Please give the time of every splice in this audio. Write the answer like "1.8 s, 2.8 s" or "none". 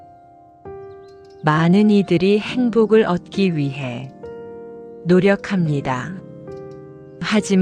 1.4 s